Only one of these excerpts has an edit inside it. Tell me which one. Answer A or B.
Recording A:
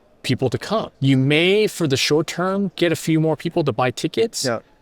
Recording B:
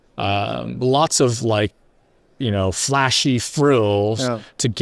A